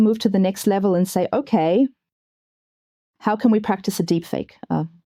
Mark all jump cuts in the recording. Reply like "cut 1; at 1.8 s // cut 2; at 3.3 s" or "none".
none

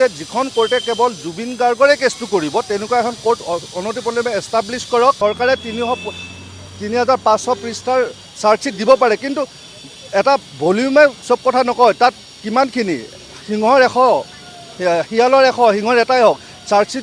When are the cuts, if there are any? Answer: cut 1; at 5.2 s

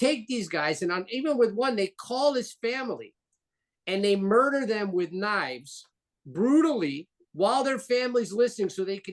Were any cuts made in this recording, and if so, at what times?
none

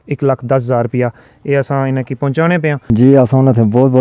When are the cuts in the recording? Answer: cut 1; at 2.8 s

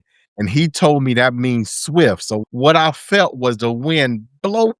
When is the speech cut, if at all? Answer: none

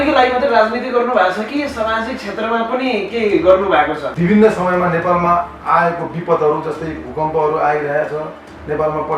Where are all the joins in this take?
cut 1; at 4.1 s

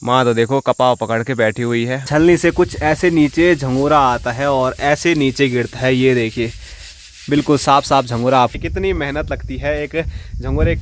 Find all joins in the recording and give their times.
cut 1; at 2.0 s // cut 2; at 8.5 s

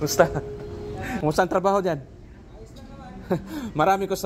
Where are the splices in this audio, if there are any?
cut 1; at 1.2 s

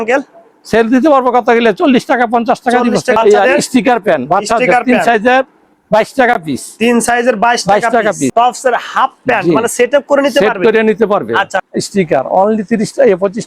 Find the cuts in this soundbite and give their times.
cut 1; at 3.2 s // cut 2; at 8.3 s // cut 3; at 11.6 s

